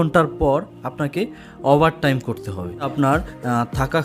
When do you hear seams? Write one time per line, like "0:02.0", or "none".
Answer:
0:02.9

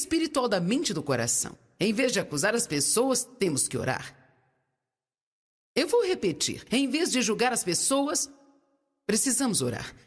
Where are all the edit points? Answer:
none

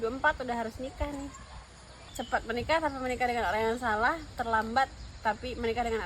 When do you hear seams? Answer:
0:02.1

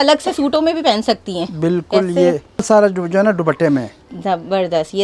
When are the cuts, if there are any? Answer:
0:02.6

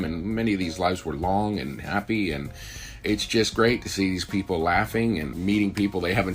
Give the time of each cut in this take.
0:03.0
0:05.3

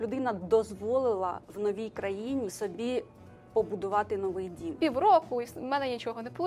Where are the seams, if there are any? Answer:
0:02.5
0:04.7

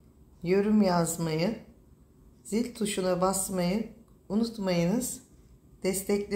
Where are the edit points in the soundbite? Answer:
none

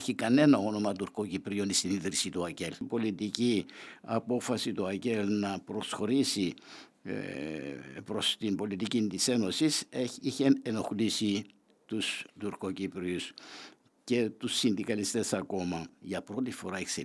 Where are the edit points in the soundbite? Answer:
0:02.9
0:16.0

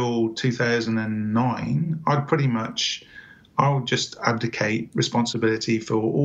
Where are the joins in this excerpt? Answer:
none

